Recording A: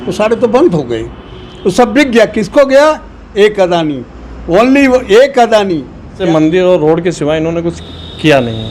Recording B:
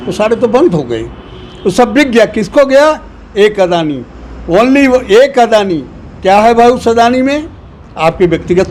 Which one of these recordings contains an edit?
A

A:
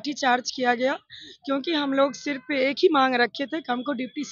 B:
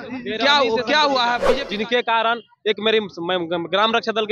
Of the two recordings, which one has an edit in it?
B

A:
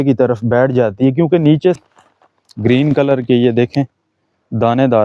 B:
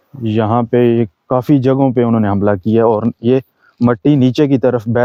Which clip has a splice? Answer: A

